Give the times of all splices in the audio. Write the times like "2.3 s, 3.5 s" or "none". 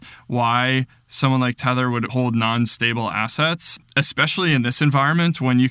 2.1 s, 3.9 s